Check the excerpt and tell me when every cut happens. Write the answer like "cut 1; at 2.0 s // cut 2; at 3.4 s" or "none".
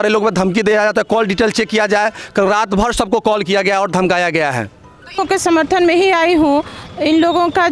cut 1; at 5.2 s